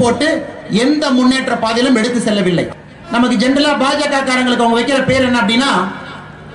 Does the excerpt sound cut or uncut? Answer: cut